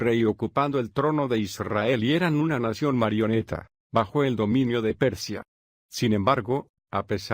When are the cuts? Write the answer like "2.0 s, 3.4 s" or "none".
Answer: none